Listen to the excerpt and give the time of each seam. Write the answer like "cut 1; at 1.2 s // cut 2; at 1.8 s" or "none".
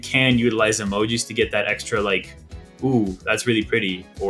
none